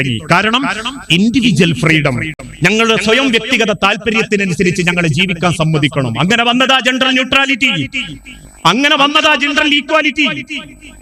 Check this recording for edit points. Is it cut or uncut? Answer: uncut